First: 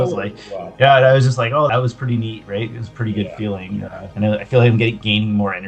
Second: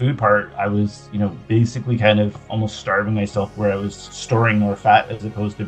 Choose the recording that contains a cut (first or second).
first